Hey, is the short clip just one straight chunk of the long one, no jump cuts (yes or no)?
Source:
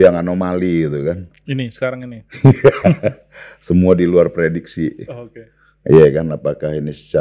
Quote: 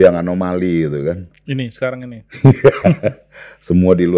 yes